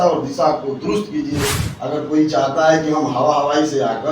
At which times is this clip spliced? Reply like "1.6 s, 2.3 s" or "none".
1.6 s